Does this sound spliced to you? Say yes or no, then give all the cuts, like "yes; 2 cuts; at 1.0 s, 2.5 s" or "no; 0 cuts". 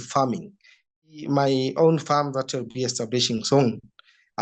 yes; 1 cut; at 1.0 s